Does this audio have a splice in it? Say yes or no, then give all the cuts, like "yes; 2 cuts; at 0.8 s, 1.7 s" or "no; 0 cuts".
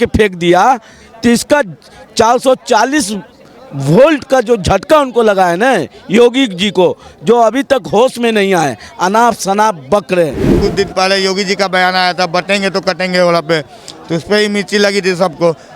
yes; 1 cut; at 10.5 s